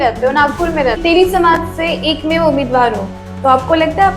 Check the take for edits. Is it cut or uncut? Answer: cut